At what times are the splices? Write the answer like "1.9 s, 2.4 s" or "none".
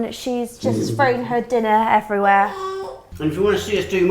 3.0 s